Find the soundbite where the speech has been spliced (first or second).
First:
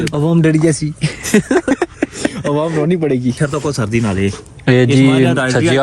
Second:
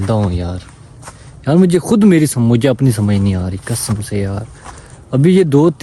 first